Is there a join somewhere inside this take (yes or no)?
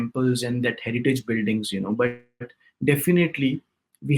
no